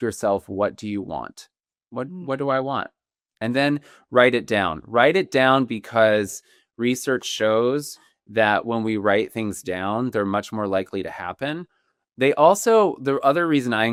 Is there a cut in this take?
no; 0 cuts

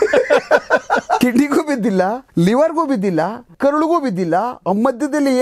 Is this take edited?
yes; 3 cuts; at 1.2 s, 2.2 s, 3.5 s

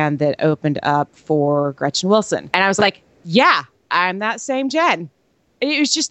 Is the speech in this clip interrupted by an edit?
yes; 1 cut; at 2.5 s

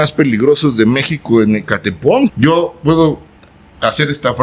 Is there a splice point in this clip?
yes; 1 cut; at 2.3 s

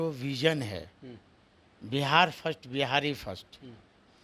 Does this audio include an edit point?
no; 0 cuts

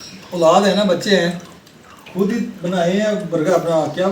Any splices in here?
no; 0 cuts

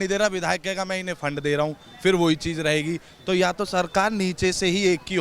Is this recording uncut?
yes; 0 cuts

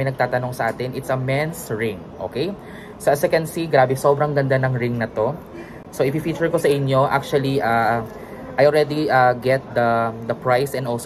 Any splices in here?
no; 0 cuts

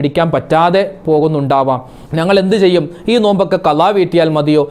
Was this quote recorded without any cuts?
yes; 0 cuts

